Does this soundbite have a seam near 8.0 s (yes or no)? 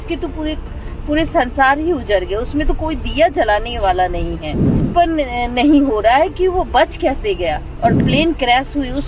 yes